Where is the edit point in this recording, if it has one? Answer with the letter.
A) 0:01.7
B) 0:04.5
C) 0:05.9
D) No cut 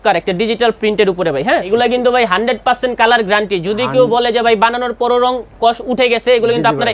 A